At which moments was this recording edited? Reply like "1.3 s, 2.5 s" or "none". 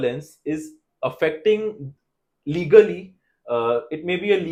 none